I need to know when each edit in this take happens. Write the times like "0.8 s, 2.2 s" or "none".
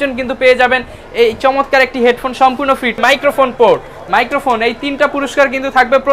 2.9 s